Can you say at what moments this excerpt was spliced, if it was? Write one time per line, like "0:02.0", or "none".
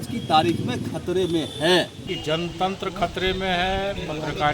0:02.0